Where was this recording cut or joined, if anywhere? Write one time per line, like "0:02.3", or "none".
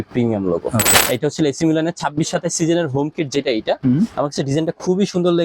0:00.9

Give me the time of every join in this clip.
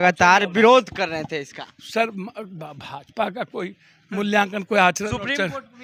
none

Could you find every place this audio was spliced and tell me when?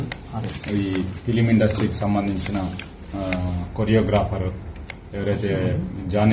none

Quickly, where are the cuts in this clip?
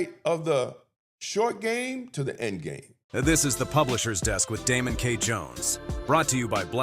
0:03.0

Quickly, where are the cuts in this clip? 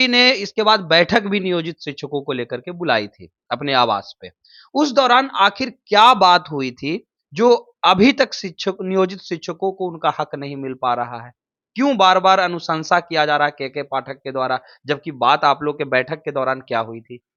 none

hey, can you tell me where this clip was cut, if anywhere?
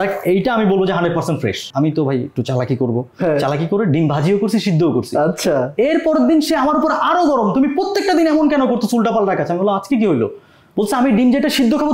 0:01.6

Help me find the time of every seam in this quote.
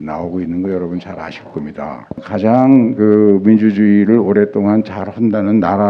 0:02.2

